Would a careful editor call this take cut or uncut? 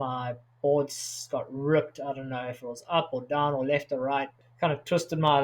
cut